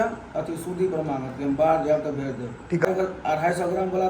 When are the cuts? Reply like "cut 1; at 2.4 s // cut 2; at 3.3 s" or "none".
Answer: cut 1; at 2.8 s